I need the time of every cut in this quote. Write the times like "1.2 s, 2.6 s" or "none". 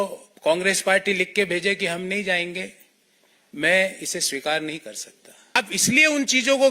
5.6 s